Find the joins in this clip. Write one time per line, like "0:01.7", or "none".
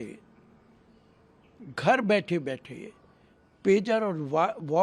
none